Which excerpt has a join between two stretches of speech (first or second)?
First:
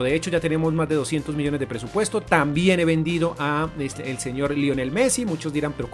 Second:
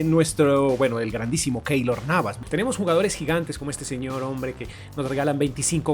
second